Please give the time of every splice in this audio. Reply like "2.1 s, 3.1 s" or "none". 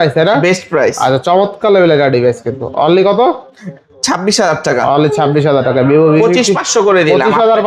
none